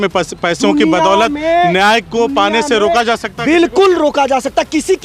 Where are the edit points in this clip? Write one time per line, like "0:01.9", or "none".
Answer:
none

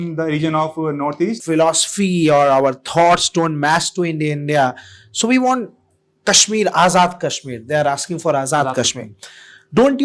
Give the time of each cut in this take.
0:01.4

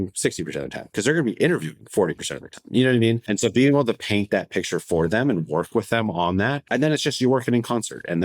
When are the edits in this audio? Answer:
0:03.2
0:06.6

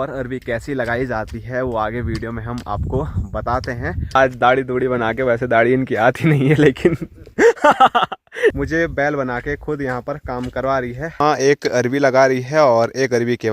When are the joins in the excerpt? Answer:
0:04.2
0:08.6
0:11.2

